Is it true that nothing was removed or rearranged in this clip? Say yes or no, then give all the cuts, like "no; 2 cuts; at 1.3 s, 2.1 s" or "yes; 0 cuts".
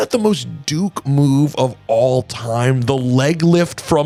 yes; 0 cuts